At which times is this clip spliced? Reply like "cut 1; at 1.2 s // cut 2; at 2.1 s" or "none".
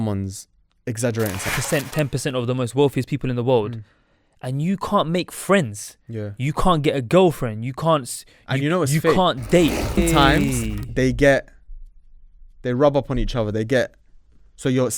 cut 1; at 1.6 s // cut 2; at 10.0 s